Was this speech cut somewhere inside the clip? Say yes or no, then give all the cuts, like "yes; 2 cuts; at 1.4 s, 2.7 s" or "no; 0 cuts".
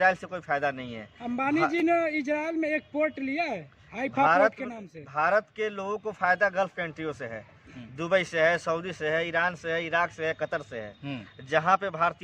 no; 0 cuts